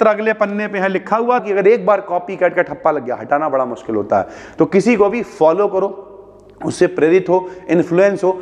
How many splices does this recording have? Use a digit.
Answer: 1